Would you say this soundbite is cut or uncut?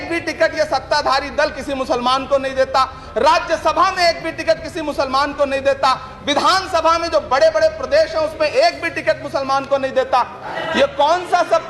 cut